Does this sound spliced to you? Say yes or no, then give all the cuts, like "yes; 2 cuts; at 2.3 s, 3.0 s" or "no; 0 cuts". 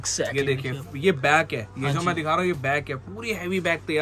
no; 0 cuts